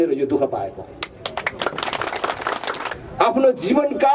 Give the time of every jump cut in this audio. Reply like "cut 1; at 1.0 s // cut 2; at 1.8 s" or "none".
cut 1; at 2.9 s

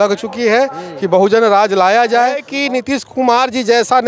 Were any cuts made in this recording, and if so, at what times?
cut 1; at 2.5 s

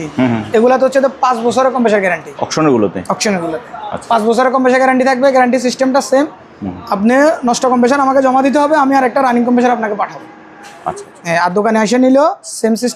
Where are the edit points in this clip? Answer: none

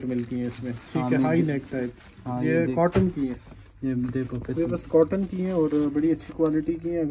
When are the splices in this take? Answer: none

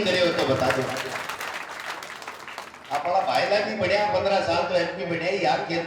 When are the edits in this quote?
cut 1; at 1.3 s

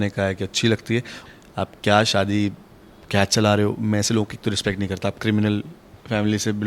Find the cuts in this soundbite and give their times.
cut 1; at 1.2 s

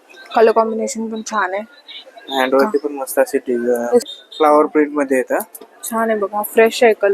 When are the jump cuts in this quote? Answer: cut 1; at 4.0 s

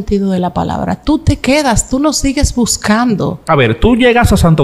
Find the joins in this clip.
cut 1; at 3.4 s

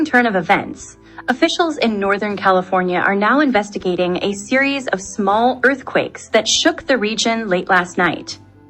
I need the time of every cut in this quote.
cut 1; at 2.8 s

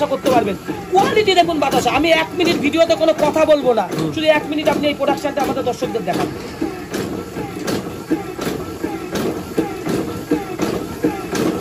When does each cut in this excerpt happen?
none

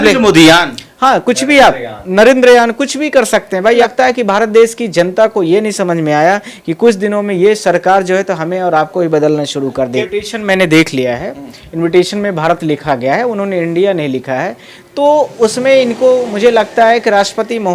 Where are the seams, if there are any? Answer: cut 1; at 3.8 s // cut 2; at 10.1 s

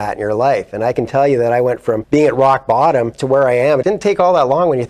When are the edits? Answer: cut 1; at 2.0 s // cut 2; at 3.5 s

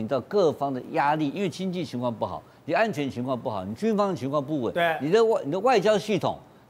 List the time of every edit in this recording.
none

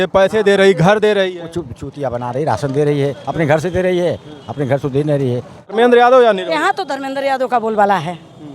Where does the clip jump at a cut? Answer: cut 1; at 5.7 s

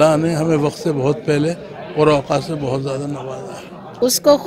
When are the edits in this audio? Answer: cut 1; at 3.3 s

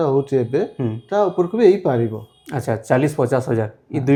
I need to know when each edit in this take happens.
none

